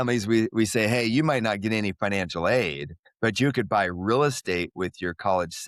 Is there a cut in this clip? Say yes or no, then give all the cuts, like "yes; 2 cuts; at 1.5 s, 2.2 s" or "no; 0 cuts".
no; 0 cuts